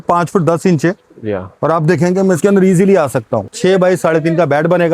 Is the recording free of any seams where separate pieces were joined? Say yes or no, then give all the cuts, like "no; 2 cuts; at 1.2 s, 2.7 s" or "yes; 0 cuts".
no; 1 cut; at 3.4 s